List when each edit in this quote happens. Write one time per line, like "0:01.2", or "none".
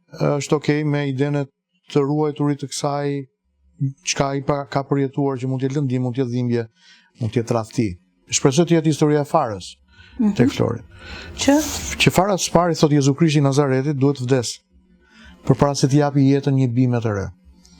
0:08.3